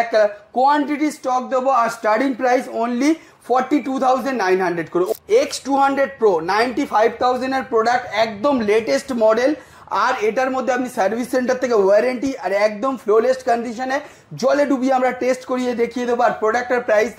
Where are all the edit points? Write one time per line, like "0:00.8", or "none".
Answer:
0:05.1